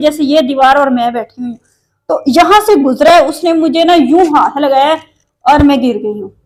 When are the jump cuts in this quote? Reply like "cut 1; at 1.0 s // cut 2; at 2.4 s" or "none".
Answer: none